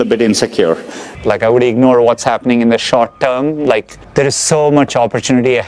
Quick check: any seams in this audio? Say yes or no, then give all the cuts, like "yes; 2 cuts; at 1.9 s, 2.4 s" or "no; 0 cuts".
yes; 1 cut; at 1.0 s